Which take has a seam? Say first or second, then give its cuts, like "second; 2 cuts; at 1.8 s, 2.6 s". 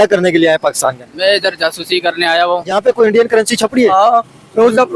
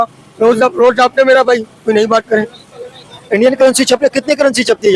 first; 1 cut; at 2.7 s